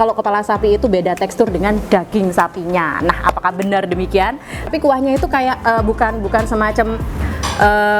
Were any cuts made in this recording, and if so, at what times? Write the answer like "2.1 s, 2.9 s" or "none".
4.7 s